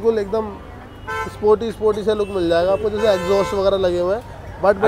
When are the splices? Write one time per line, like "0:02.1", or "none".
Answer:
none